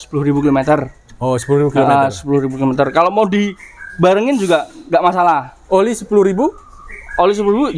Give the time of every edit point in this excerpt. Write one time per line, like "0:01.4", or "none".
none